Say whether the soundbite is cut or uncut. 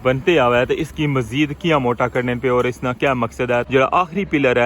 cut